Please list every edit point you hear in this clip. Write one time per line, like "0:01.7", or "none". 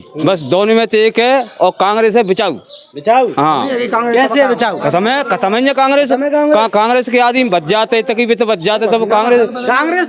none